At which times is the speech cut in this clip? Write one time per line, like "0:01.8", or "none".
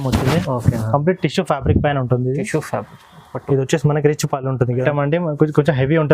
0:04.8